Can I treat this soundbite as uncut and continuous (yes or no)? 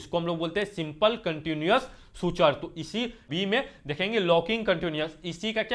no